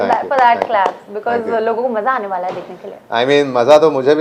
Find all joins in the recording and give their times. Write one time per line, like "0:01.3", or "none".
none